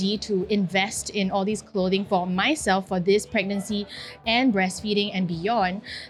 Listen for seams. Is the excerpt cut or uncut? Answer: uncut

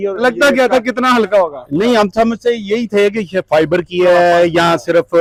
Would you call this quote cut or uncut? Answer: uncut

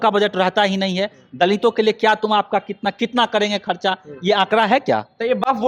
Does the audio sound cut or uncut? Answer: uncut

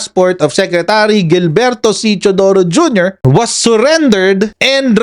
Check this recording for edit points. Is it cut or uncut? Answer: uncut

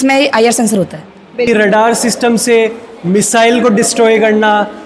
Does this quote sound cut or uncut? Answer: cut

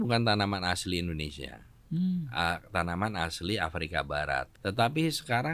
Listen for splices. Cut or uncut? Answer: cut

